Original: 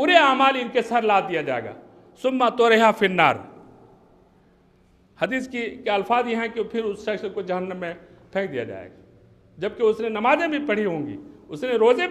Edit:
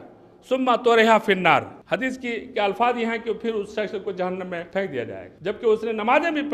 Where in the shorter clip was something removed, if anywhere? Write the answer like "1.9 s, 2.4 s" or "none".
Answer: 1.8 s, 4.8 s